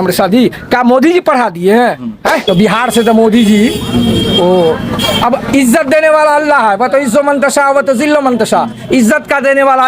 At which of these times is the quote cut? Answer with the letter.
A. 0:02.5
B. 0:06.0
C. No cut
A